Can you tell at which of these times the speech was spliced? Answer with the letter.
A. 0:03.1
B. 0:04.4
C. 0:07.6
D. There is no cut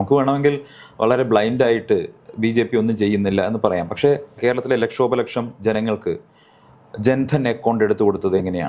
B